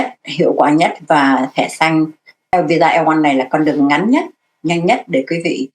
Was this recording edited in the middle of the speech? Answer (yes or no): yes